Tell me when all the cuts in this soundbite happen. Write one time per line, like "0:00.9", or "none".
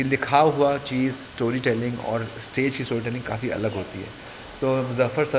none